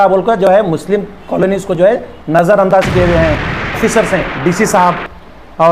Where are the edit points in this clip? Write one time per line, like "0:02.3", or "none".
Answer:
0:03.8

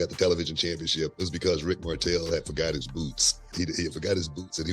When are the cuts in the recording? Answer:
0:01.1
0:03.5

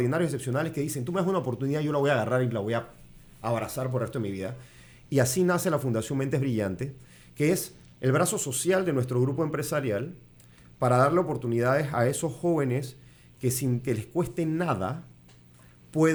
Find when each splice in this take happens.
none

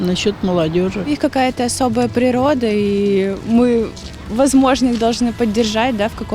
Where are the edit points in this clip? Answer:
0:01.2

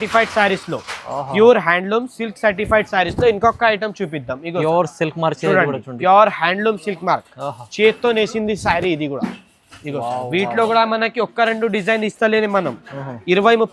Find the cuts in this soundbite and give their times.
none

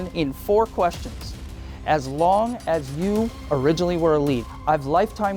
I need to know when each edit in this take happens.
0:04.4

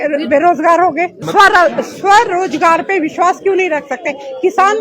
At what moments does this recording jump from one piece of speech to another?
0:01.2

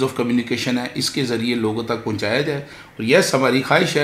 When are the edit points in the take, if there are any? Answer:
none

